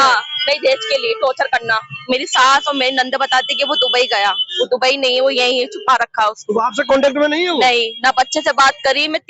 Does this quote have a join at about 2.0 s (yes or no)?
yes